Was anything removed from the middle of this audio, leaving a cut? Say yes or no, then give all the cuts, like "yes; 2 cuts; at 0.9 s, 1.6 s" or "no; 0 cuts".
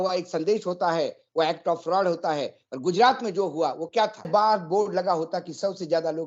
yes; 1 cut; at 4.3 s